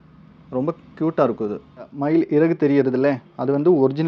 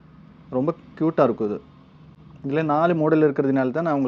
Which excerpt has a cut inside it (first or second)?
first